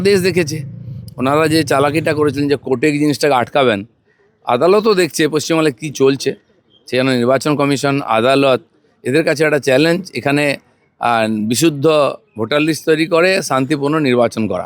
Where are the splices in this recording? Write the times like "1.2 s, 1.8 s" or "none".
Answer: none